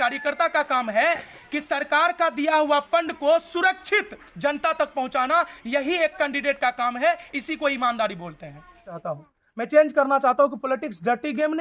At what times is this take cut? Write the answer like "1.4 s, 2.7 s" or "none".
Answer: 9.1 s